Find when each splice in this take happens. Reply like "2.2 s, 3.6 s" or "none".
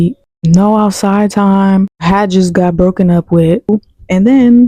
3.7 s